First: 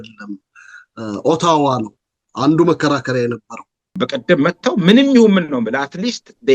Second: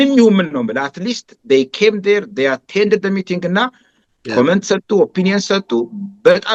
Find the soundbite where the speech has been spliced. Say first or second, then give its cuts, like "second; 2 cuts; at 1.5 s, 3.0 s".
first; 1 cut; at 3.9 s